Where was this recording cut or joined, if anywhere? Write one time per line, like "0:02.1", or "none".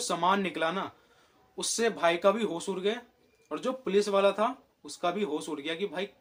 none